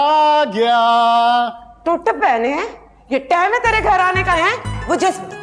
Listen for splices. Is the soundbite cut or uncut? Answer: uncut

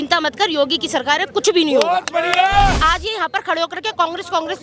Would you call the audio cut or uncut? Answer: cut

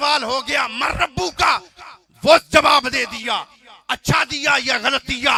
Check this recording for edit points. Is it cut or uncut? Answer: uncut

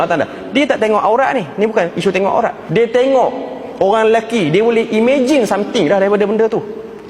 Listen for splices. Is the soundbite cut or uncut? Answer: cut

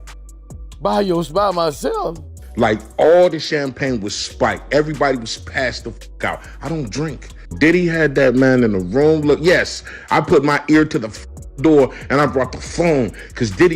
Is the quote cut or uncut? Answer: cut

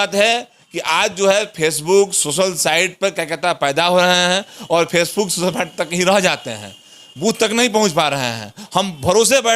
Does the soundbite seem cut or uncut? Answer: uncut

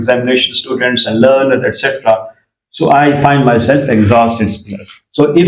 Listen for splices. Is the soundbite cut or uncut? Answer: uncut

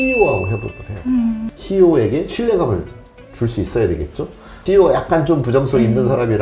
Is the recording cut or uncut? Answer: cut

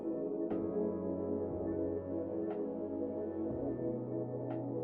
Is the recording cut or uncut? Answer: uncut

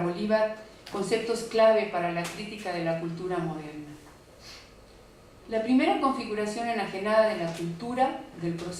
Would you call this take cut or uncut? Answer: uncut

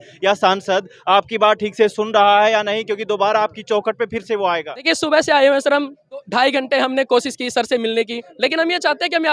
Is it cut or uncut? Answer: cut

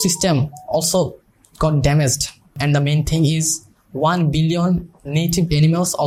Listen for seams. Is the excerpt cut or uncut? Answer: uncut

